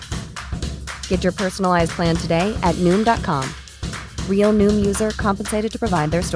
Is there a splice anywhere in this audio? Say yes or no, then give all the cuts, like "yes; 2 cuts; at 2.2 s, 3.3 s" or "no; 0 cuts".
no; 0 cuts